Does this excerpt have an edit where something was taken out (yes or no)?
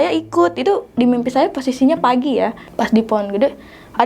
yes